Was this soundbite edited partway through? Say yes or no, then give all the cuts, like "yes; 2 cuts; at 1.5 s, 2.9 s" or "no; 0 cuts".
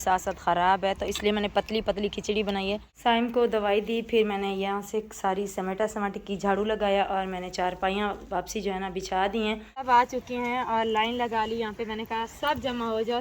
yes; 2 cuts; at 2.9 s, 9.7 s